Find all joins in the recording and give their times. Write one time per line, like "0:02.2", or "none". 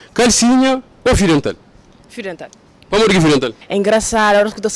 0:03.6

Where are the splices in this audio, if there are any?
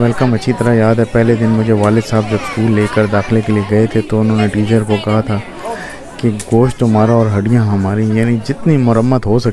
none

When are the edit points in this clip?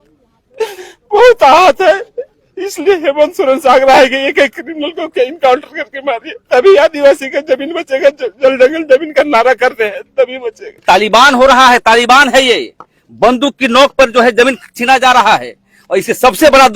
0:10.8

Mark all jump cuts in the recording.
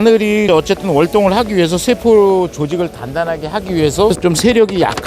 0:04.2

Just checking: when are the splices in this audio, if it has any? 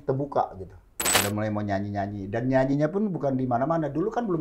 0:01.1

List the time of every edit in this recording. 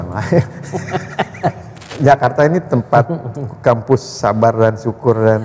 0:01.9

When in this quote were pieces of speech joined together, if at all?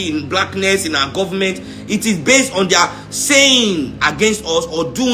none

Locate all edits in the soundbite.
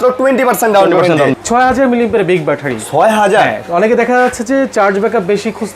0:01.3

